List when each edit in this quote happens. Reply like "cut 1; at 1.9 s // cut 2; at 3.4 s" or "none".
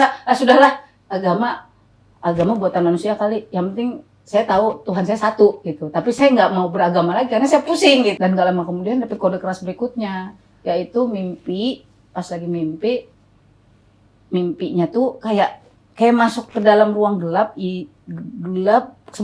cut 1; at 8.2 s